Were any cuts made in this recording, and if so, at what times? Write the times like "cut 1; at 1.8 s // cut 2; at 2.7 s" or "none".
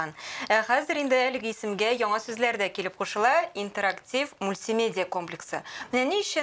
none